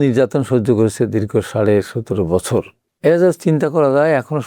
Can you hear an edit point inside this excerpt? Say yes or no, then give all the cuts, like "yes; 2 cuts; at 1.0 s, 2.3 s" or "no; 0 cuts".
yes; 1 cut; at 2.8 s